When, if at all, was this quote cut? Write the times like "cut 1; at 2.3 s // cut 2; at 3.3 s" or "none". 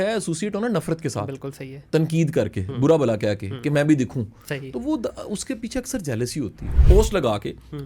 cut 1; at 6.7 s